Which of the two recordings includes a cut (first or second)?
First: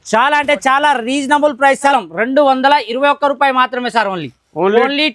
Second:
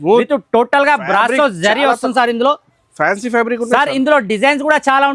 first